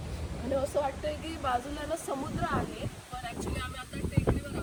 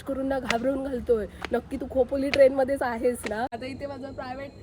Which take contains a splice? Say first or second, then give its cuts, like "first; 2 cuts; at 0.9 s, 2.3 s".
second; 1 cut; at 3.6 s